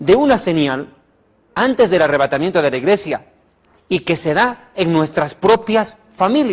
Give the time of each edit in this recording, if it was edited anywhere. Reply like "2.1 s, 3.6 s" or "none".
none

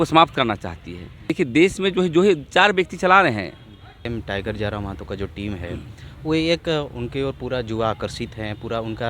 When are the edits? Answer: 1.3 s, 4.0 s

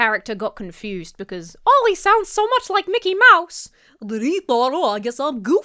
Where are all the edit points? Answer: none

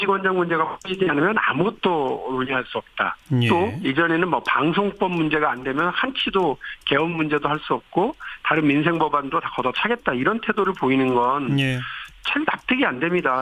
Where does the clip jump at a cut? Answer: none

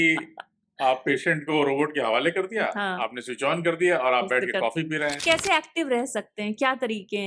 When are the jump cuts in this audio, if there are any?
5.2 s

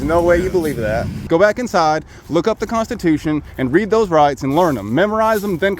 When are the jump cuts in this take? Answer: 1.2 s

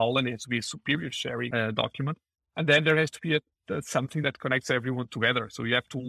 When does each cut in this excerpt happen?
4.2 s

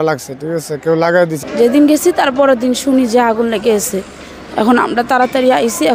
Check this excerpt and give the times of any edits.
1.3 s

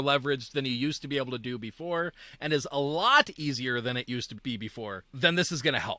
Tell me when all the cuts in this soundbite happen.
5.0 s

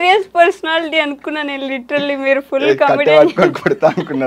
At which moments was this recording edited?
none

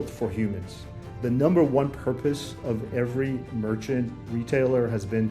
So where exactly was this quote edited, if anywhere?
0.9 s

